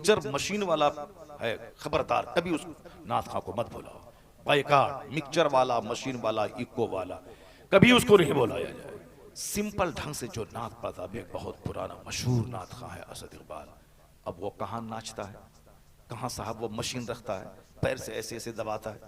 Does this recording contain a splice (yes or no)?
yes